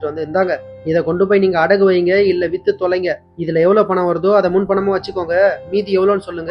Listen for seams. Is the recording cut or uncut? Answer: uncut